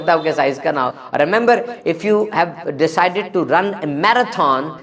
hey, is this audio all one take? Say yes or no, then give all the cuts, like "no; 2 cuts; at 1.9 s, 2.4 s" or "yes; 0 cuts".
yes; 0 cuts